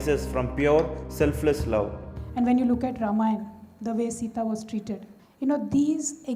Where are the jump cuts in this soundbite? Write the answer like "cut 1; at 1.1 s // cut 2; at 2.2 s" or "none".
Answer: cut 1; at 2.0 s